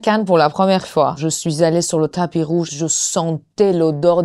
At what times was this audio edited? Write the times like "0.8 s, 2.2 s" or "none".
1.2 s, 2.7 s